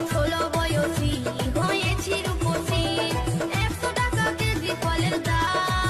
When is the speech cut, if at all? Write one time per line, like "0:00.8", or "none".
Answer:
none